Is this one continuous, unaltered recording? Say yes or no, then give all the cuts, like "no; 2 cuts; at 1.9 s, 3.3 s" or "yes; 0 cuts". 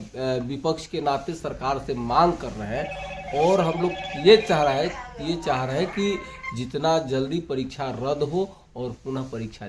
yes; 0 cuts